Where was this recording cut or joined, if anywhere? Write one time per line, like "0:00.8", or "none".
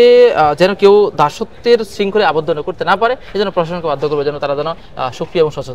none